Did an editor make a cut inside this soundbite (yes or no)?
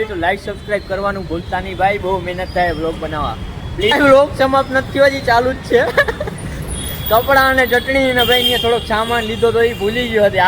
yes